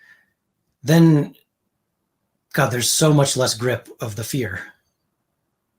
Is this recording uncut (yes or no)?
yes